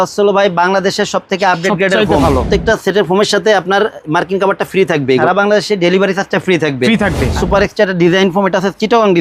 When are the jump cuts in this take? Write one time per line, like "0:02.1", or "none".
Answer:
0:02.3
0:05.2
0:07.4